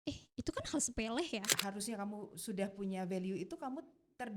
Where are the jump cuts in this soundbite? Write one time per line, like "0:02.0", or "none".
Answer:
0:01.5